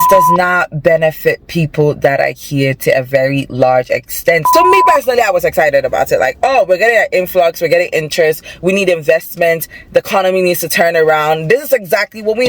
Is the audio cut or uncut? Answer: cut